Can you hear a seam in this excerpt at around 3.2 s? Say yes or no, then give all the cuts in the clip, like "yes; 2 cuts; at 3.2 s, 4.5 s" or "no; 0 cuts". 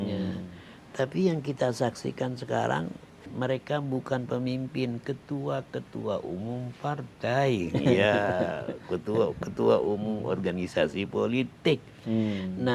yes; 1 cut; at 3.2 s